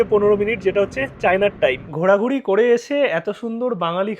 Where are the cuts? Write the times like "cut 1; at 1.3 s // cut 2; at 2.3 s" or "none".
cut 1; at 1.9 s